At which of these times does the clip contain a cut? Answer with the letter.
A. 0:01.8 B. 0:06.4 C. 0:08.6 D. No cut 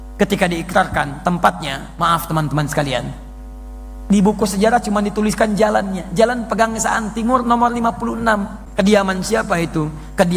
C